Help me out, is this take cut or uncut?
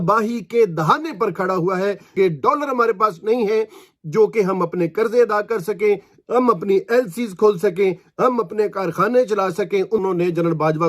cut